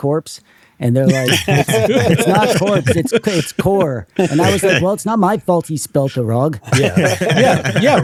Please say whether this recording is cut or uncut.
uncut